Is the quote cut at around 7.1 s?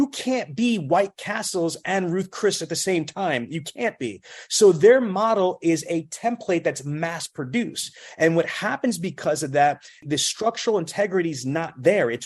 no; 1 cut; at 10.0 s

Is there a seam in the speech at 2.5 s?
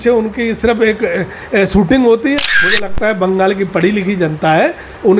yes; 1 cut; at 2.5 s

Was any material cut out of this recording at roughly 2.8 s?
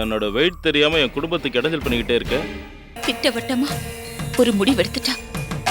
yes; 1 cut; at 2.8 s

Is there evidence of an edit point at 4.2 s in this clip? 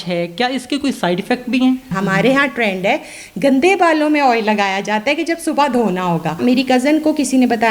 no; 2 cuts; at 1.9 s, 6.3 s

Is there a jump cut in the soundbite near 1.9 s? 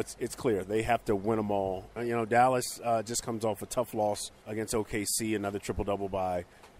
yes; 2 cuts; at 1.9 s, 4.3 s

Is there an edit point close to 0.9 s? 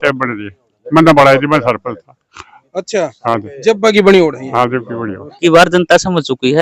no; 1 cut; at 5.3 s

